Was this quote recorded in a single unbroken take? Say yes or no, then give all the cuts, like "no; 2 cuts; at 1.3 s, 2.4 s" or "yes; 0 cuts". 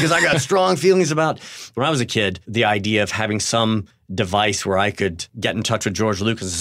no; 4 cuts; at 1.7 s, 2.4 s, 4.0 s, 5.3 s